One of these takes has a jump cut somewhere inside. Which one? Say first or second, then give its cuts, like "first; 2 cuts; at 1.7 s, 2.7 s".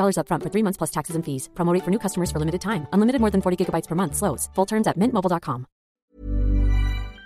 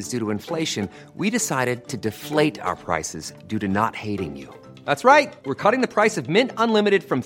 first; 1 cut; at 6.0 s